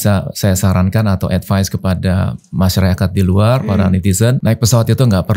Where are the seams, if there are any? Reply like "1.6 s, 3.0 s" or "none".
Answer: 4.4 s